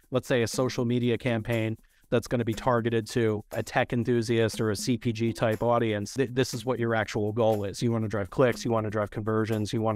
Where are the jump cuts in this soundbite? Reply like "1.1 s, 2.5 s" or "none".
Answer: 3.6 s, 6.1 s